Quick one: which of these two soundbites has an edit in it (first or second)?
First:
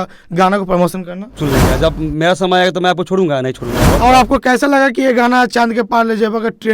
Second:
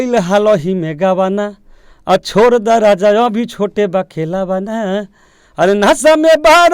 first